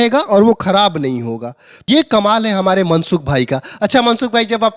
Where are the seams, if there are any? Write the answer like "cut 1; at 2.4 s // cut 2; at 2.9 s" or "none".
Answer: none